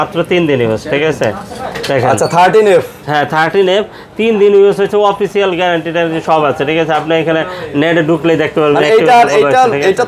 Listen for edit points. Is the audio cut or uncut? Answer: uncut